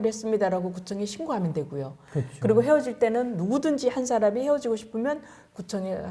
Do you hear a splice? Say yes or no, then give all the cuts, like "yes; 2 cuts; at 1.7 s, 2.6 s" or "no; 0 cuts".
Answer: no; 0 cuts